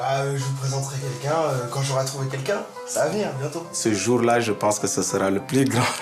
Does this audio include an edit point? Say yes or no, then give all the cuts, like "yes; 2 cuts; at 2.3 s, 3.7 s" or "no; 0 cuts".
yes; 1 cut; at 3.8 s